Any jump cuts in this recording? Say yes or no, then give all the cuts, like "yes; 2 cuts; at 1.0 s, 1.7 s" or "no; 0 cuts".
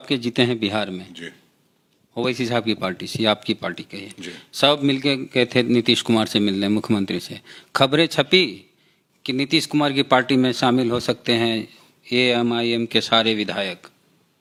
no; 0 cuts